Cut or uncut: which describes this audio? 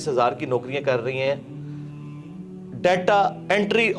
uncut